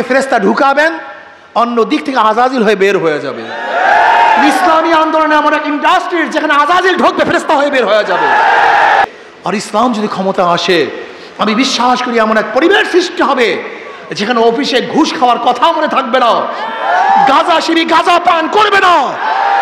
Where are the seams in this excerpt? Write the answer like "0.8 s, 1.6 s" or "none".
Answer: 9.0 s